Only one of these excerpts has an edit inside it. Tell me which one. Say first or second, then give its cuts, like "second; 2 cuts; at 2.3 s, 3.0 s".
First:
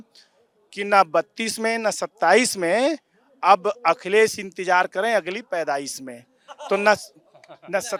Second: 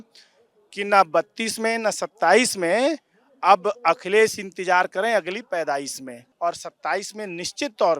second; 1 cut; at 6.2 s